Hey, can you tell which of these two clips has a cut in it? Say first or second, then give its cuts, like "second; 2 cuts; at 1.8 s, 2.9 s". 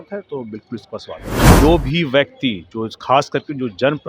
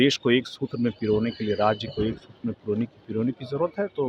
first; 1 cut; at 1.5 s